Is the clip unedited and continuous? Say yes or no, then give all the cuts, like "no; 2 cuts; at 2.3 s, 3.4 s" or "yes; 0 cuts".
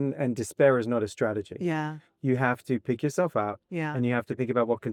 yes; 0 cuts